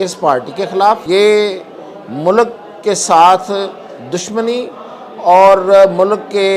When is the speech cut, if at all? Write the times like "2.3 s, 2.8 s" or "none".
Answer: 1.0 s